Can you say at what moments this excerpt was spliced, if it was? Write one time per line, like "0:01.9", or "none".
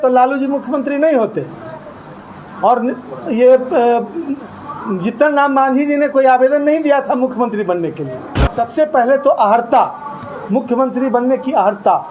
0:08.4